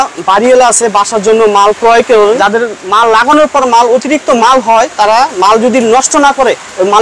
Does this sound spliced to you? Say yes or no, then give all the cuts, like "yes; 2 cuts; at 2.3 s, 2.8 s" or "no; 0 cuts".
yes; 1 cut; at 2.4 s